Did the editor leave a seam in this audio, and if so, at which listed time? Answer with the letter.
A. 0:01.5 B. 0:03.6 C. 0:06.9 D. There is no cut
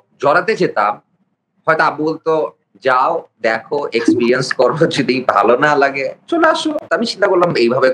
C